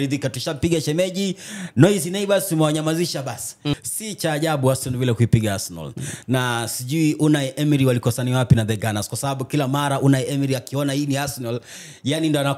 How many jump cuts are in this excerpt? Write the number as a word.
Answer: one